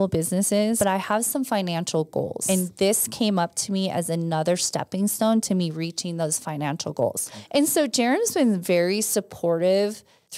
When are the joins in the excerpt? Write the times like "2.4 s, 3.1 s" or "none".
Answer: 2.4 s